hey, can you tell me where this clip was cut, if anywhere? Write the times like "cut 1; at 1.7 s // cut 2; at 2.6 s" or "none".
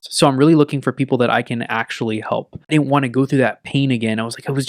cut 1; at 2.5 s